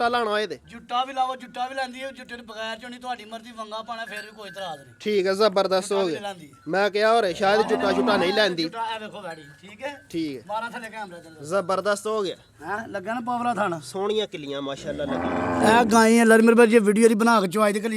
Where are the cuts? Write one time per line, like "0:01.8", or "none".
none